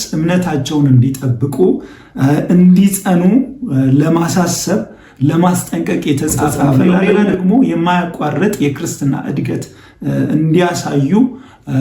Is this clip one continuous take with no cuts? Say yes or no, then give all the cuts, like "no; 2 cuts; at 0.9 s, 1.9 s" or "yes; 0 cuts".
no; 1 cut; at 6.8 s